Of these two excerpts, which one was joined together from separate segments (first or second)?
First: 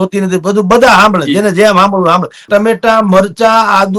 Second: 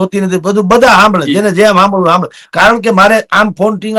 first